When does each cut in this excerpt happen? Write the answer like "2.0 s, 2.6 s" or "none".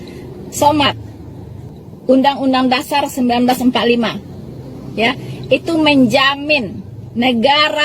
1.7 s

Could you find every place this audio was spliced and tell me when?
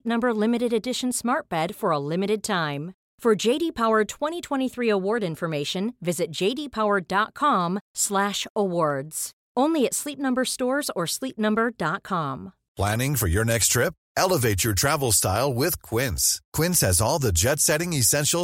12.6 s

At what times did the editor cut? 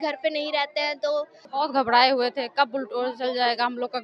1.4 s

